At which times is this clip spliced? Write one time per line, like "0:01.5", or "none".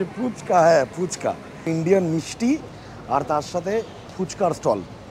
0:01.7